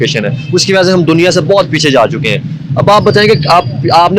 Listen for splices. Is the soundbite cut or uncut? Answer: uncut